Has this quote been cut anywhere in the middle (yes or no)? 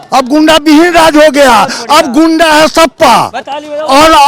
no